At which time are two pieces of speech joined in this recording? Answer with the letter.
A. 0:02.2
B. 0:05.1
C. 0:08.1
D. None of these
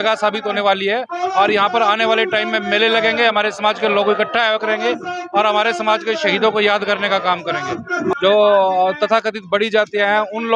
C